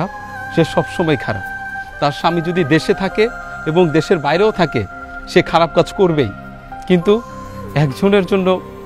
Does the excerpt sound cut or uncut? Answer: uncut